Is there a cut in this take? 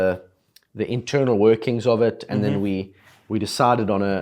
no; 0 cuts

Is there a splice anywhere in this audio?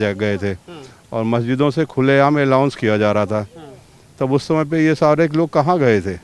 no; 0 cuts

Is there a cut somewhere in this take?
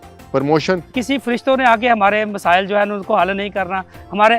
yes; 1 cut; at 1.0 s

